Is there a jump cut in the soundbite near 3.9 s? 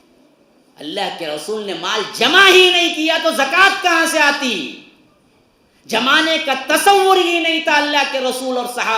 no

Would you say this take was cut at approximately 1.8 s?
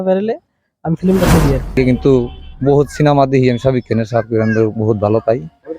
yes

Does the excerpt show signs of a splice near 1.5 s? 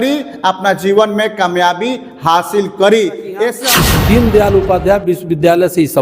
no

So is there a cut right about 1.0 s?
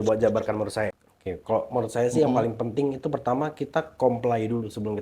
yes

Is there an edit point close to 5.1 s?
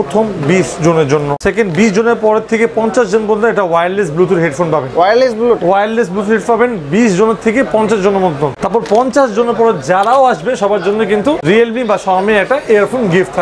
no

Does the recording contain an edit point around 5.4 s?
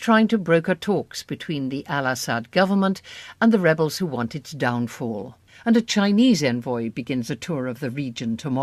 no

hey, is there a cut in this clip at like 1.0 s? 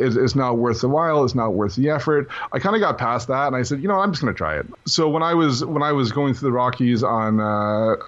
no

